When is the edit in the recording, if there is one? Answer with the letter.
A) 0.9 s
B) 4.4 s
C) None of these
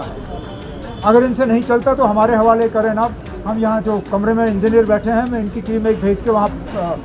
C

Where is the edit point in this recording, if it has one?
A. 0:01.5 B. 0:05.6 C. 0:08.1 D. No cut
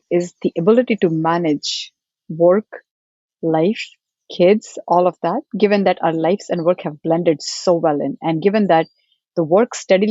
D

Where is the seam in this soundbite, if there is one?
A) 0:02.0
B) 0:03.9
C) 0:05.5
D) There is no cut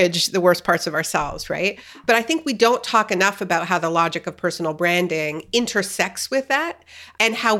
A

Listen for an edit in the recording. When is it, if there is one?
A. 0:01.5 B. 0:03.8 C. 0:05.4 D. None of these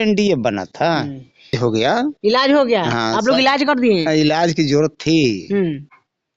A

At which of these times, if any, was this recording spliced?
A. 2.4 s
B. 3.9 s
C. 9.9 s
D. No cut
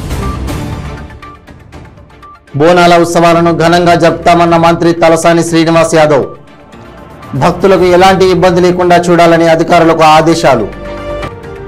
A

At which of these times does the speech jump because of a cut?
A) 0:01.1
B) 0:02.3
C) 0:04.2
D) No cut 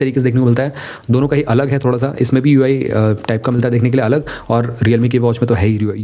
D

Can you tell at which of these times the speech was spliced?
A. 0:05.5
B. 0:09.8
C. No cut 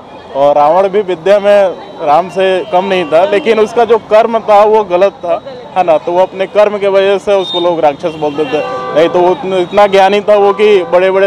C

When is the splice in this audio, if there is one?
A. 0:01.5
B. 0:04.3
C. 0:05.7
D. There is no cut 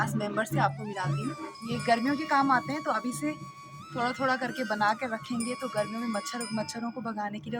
A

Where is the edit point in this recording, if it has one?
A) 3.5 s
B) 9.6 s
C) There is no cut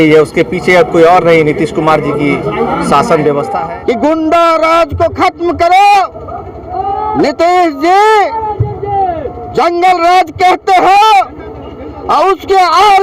A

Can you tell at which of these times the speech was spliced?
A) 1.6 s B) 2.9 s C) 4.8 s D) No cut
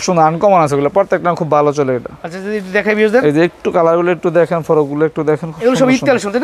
D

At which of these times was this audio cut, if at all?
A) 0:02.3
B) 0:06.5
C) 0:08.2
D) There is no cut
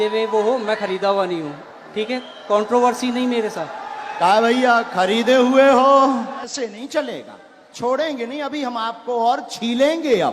B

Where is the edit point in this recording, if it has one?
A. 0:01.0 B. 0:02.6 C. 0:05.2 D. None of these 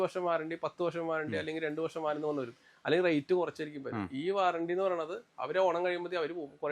D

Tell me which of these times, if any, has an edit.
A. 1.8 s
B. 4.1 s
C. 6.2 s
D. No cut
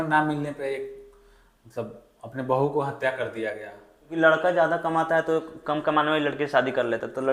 B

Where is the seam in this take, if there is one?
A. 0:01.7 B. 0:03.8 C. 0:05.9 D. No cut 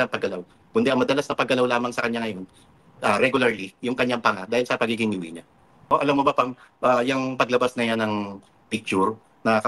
C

